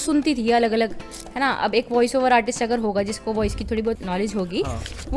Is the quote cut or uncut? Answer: cut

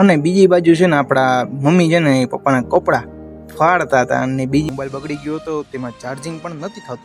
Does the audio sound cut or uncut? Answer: cut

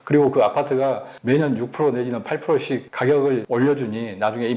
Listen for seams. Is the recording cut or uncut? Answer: cut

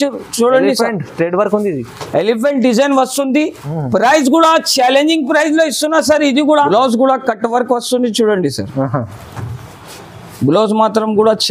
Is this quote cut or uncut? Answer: cut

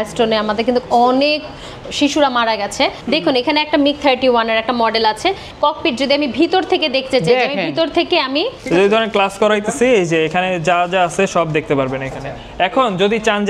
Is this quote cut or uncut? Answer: cut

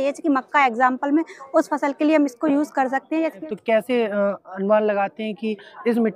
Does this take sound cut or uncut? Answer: cut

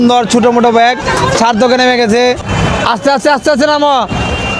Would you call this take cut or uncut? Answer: cut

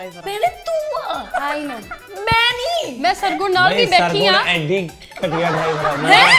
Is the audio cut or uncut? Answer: uncut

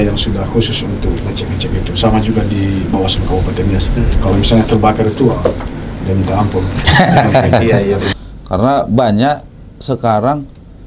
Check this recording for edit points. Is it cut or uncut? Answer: cut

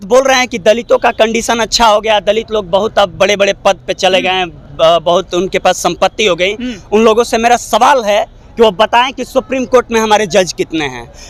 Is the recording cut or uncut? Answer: uncut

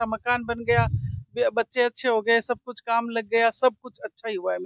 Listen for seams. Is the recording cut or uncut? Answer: uncut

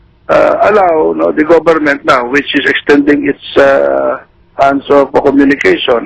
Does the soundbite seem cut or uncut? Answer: uncut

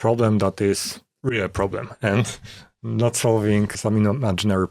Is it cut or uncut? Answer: cut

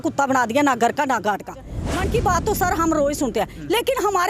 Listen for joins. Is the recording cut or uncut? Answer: cut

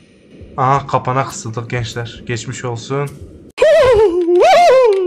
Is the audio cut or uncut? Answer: uncut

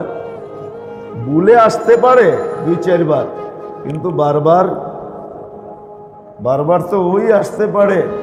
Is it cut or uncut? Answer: uncut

